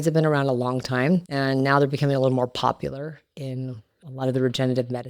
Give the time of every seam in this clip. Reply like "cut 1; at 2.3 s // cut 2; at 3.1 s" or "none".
cut 1; at 1.3 s